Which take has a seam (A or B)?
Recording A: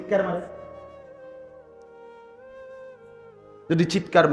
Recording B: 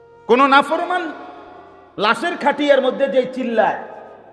A